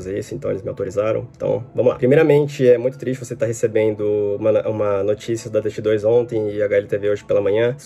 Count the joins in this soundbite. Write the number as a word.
zero